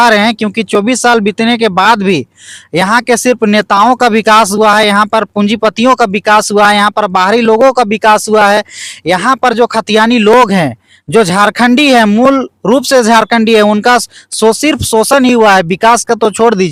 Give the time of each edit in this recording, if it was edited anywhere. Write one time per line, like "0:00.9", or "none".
none